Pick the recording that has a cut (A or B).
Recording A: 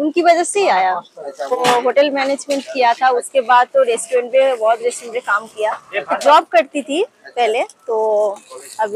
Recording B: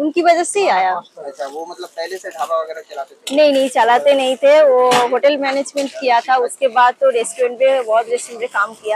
A